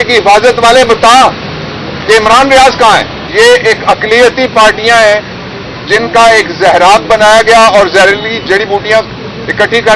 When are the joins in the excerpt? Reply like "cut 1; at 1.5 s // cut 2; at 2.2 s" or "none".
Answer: cut 1; at 3.2 s